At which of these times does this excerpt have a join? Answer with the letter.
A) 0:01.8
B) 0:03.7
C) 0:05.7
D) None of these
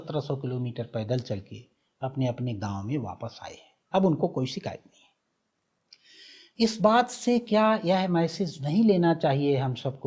B